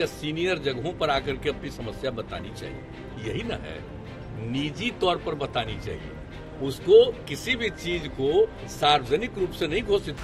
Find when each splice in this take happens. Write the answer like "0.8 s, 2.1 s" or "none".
none